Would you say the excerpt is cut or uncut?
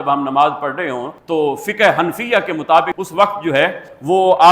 cut